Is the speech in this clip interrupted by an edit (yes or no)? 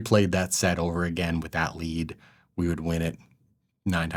no